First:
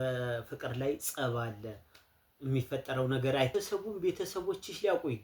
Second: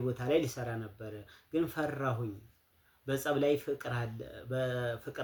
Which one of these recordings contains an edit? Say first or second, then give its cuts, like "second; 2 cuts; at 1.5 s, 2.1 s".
first; 1 cut; at 3.5 s